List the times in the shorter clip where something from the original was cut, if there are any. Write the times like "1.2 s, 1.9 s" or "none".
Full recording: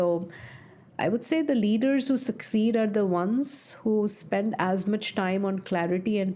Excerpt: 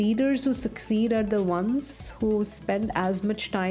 none